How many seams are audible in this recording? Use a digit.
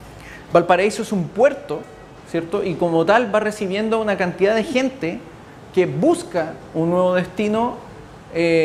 0